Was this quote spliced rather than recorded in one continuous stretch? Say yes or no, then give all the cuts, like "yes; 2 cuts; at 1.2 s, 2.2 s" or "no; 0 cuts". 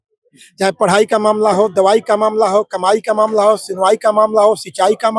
no; 0 cuts